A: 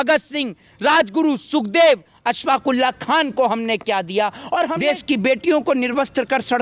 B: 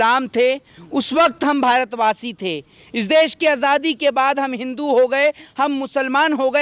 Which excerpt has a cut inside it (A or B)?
A